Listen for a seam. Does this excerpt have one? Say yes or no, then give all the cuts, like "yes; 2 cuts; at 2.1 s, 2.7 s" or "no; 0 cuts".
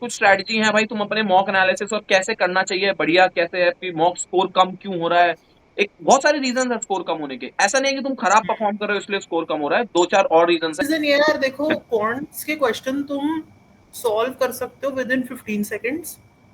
yes; 1 cut; at 10.8 s